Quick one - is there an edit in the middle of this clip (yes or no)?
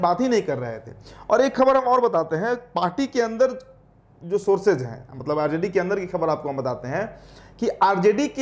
no